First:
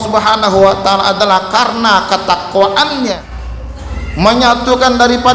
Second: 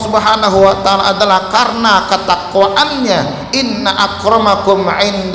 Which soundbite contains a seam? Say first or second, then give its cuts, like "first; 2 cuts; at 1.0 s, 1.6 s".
first; 1 cut; at 3.2 s